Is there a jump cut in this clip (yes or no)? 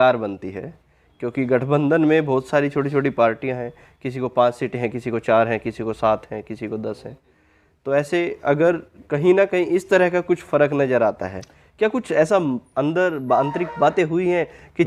no